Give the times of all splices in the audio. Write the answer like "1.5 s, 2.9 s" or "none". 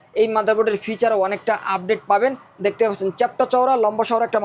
none